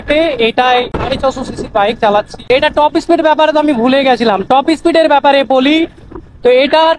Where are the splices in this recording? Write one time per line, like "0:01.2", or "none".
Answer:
0:00.9
0:02.5